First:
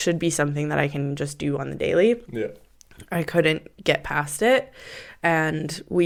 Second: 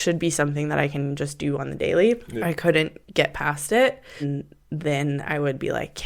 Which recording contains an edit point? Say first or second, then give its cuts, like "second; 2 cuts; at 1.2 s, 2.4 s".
second; 2 cuts; at 2.3 s, 4.2 s